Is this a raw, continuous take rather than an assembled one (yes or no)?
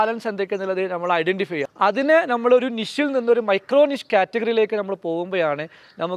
no